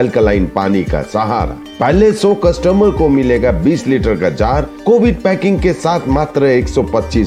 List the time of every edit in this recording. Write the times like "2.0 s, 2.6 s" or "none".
none